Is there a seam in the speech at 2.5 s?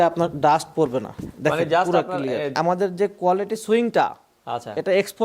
yes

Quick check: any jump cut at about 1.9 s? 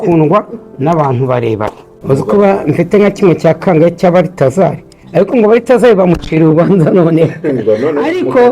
yes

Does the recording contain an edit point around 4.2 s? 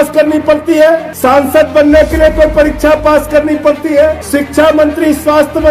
yes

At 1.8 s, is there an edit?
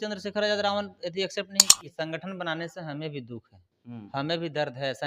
yes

